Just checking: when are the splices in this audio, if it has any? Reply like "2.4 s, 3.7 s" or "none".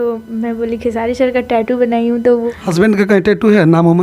2.4 s